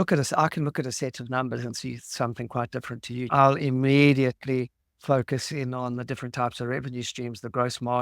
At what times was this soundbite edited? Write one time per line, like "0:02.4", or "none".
0:03.3